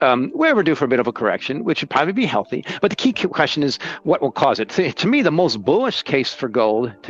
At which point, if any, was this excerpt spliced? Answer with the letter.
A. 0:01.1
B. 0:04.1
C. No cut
C